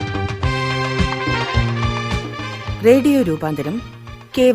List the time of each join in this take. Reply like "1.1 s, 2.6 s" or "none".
2.7 s